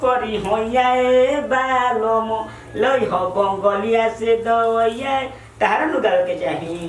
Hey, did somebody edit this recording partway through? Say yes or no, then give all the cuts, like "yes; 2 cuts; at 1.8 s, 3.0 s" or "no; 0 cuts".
no; 0 cuts